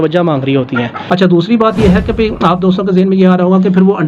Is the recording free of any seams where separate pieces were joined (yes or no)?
no